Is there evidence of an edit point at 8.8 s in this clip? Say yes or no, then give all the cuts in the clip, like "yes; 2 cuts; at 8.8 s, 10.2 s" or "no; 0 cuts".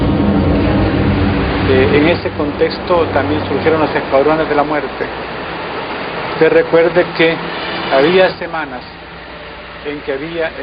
no; 1 cut; at 2.0 s